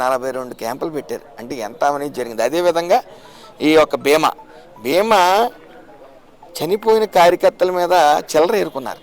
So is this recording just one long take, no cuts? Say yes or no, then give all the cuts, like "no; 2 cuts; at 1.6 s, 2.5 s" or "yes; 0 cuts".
yes; 0 cuts